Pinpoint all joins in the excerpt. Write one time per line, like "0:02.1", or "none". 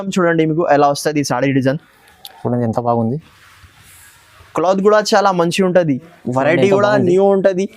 0:06.1